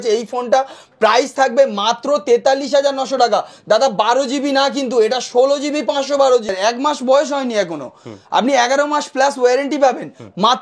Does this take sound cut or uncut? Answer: cut